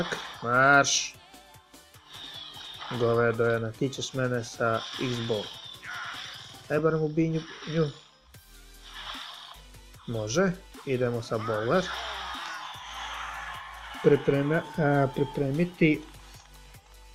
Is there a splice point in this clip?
no; 0 cuts

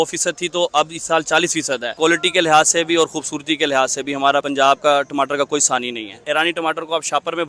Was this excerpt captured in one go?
no; 3 cuts; at 1.9 s, 4.5 s, 6.2 s

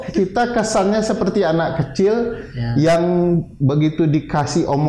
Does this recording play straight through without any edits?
yes; 0 cuts

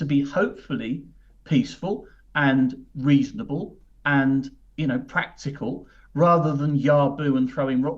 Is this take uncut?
yes; 0 cuts

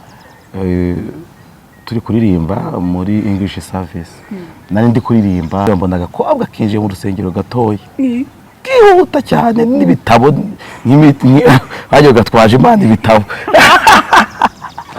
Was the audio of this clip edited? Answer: yes; 1 cut; at 5.7 s

